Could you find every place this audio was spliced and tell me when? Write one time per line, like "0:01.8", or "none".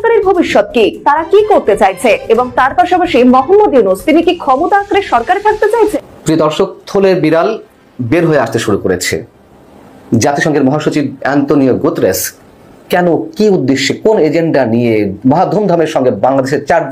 0:05.9